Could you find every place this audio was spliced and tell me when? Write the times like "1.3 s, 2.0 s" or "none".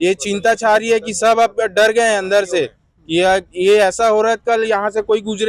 none

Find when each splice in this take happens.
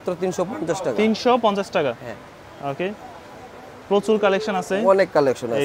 none

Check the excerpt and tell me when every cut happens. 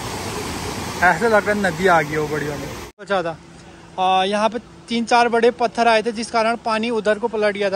3.1 s

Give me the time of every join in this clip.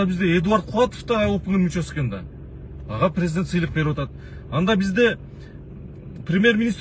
none

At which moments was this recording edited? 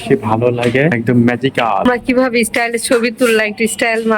1.0 s, 1.9 s

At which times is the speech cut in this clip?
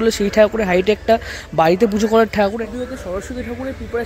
2.6 s

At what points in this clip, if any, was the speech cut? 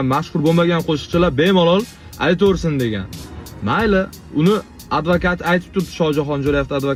none

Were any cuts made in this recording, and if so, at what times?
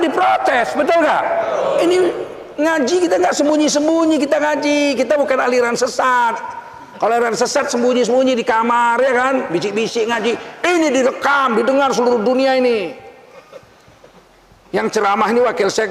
none

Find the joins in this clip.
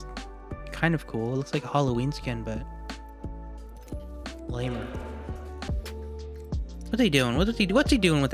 5.7 s

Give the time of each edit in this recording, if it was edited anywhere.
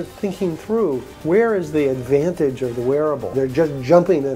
1.1 s, 3.2 s

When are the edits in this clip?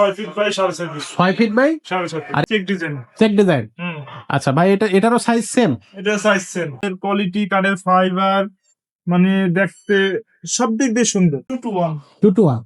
2.4 s, 6.8 s, 11.5 s

